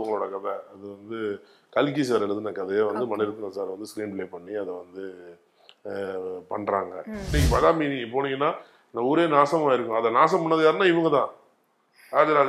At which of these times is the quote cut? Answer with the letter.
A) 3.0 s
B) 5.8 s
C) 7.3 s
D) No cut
C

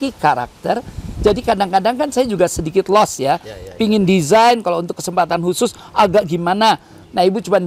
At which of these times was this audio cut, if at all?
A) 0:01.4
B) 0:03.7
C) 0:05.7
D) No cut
D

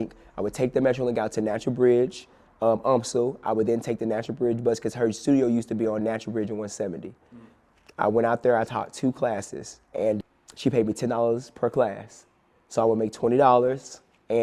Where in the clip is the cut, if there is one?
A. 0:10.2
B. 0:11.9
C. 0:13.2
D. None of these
A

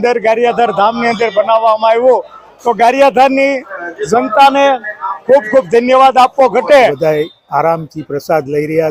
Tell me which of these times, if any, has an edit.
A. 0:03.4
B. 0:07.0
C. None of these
B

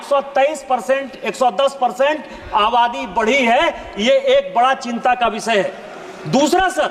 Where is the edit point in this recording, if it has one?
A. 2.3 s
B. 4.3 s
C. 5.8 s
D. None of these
D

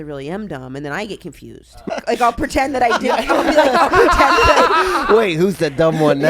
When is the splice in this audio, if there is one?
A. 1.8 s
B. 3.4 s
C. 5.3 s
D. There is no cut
A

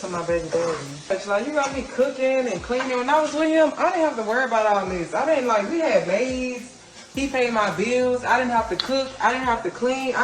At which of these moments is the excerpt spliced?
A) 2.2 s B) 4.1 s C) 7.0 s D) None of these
D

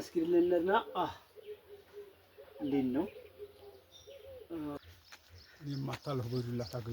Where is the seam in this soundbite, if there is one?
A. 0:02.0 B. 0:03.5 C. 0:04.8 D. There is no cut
C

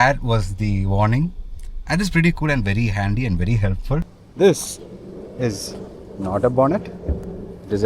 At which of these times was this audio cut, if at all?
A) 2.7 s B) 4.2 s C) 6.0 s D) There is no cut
B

